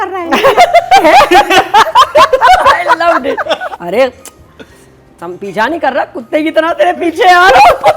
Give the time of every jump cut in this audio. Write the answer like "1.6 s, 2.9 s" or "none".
3.7 s